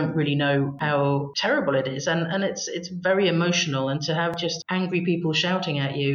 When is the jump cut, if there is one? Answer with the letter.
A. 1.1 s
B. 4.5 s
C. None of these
A